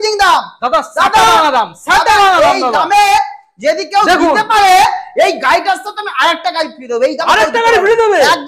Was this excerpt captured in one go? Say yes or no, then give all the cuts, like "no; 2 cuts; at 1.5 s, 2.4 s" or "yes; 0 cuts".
yes; 0 cuts